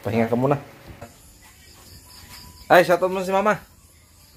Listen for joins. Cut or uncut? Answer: cut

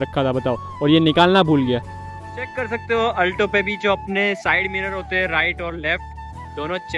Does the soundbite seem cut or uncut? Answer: cut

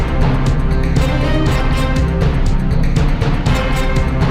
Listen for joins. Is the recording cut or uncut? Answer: uncut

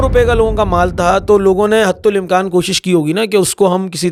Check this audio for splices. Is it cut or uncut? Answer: uncut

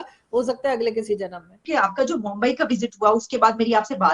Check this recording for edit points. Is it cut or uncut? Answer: uncut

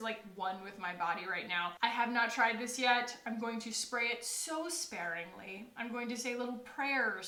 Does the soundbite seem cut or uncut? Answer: uncut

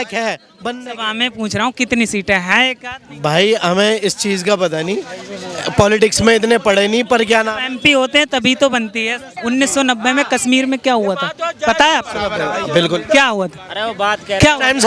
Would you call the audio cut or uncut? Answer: cut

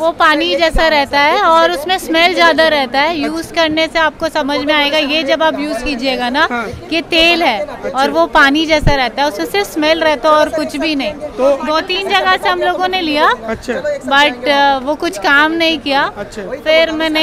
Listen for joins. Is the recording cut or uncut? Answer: uncut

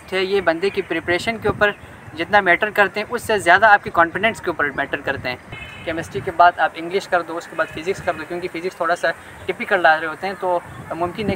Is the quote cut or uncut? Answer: cut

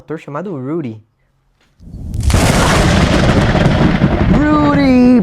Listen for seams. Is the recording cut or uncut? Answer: uncut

